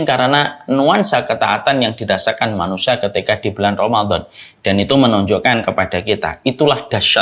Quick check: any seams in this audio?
no; 0 cuts

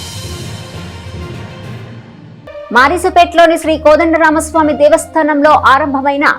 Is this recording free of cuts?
no; 1 cut; at 2.0 s

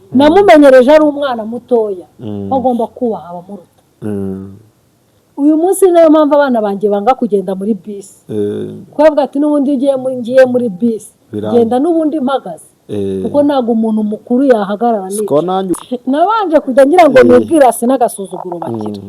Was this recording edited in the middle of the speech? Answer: yes; 1 cut; at 15.7 s

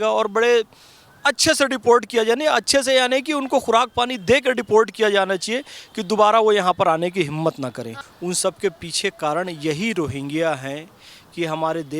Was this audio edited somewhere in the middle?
yes; 1 cut; at 8.0 s

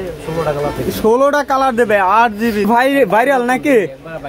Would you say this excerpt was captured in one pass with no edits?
no; 1 cut; at 2.7 s

